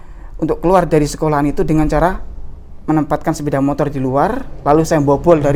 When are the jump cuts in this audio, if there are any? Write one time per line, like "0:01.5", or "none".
none